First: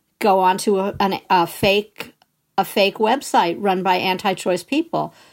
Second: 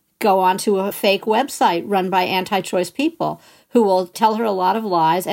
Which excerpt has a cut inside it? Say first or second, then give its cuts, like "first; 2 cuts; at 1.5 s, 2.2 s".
second; 2 cuts; at 1.0 s, 4.1 s